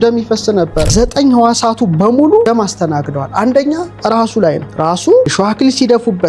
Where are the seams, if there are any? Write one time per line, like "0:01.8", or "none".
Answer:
0:00.9
0:02.4
0:04.7
0:05.3